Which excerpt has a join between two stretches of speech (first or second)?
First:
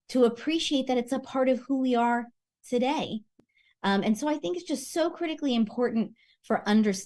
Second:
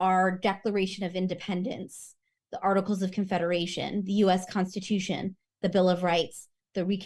first